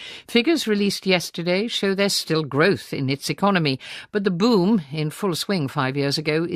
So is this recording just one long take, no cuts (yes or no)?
yes